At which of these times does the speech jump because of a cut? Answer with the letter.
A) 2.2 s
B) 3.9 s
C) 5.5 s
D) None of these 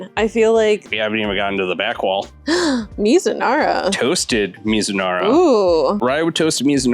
A